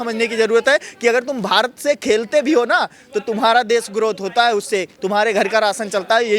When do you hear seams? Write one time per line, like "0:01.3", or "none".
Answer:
none